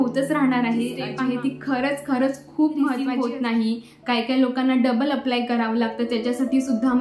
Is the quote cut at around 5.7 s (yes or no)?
no